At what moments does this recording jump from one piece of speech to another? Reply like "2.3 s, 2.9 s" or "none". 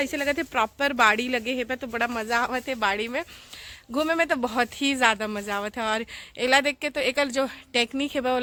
none

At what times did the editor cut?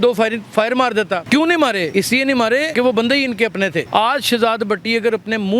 1.2 s, 2.2 s, 3.9 s

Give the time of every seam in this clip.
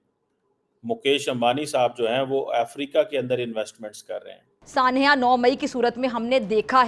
4.6 s

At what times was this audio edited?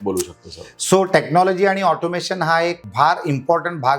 2.8 s

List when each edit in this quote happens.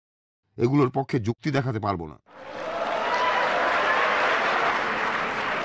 2.5 s, 4.7 s

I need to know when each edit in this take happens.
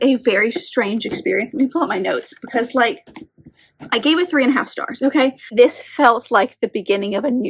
5.4 s

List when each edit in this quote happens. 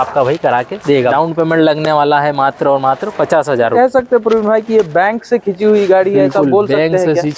1.1 s, 3.7 s

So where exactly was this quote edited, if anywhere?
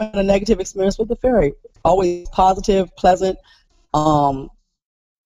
none

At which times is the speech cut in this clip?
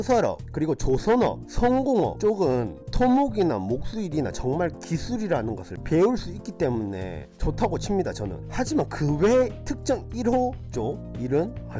none

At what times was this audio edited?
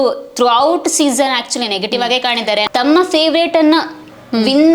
2.7 s

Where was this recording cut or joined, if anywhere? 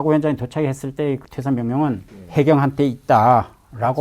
2.1 s

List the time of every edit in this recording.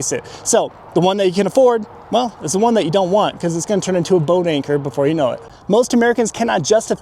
5.4 s

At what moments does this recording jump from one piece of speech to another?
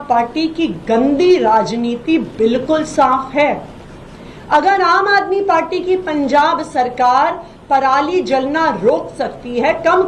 none

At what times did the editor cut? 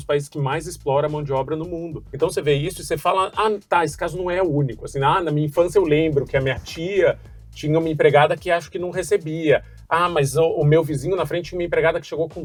none

